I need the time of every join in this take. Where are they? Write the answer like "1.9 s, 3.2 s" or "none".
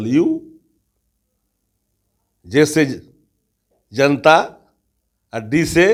none